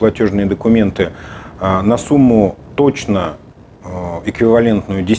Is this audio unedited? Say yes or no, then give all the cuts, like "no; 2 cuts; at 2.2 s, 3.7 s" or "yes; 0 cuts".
yes; 0 cuts